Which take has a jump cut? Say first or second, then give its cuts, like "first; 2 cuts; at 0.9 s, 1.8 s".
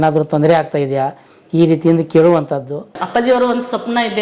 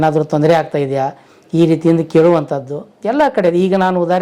first; 1 cut; at 3.0 s